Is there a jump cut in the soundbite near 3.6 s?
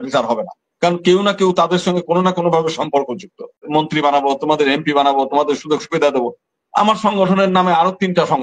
yes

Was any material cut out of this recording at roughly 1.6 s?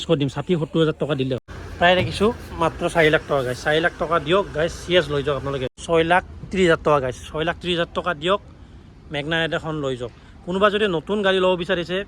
yes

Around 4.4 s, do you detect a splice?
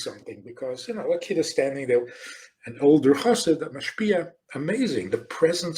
yes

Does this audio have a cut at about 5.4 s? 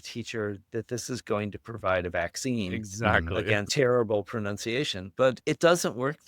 yes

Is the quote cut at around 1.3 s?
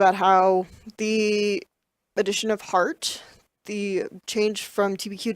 no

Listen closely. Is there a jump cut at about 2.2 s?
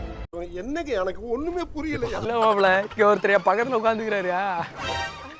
yes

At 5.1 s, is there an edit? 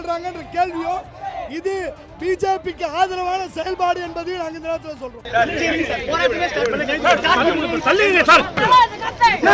yes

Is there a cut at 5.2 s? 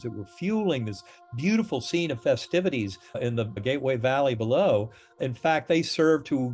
yes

